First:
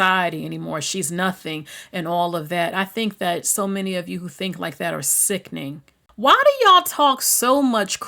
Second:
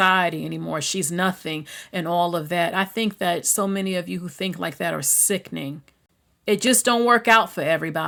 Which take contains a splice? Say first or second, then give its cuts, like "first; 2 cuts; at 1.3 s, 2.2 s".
first; 1 cut; at 6.0 s